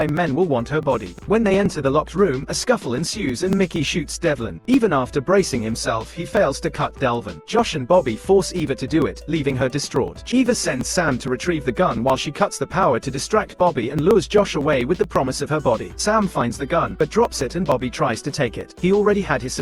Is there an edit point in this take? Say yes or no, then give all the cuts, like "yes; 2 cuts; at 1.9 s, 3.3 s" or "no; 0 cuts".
yes; 5 cuts; at 1.1 s, 4.5 s, 10.2 s, 15.9 s, 18.7 s